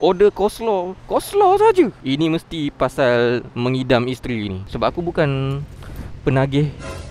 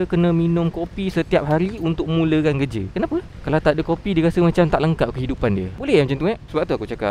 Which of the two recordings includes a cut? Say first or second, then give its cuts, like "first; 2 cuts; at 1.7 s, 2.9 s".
first; 1 cut; at 4.6 s